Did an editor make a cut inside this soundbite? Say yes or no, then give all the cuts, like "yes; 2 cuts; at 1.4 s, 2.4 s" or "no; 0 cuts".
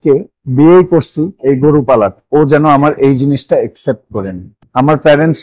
yes; 2 cuts; at 1.2 s, 2.2 s